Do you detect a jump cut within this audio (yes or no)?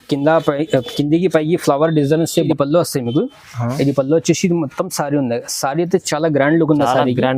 yes